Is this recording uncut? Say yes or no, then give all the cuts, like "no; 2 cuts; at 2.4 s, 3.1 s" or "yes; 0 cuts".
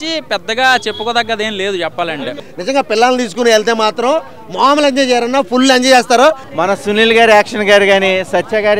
no; 2 cuts; at 2.4 s, 6.5 s